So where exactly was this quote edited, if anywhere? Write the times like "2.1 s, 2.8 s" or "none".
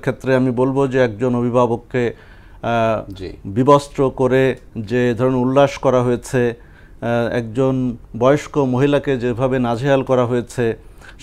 none